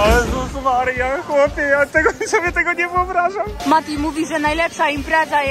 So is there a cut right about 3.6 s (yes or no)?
yes